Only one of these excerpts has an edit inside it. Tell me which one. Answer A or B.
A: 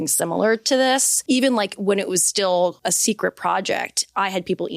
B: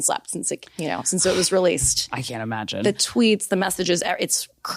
A